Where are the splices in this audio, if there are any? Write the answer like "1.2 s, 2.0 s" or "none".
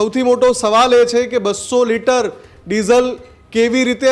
none